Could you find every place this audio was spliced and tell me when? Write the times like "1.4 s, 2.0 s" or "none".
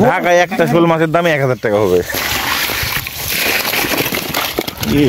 2.1 s